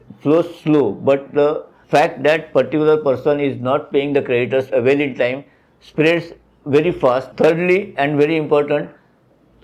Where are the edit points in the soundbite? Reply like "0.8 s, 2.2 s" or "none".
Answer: 4.7 s, 7.3 s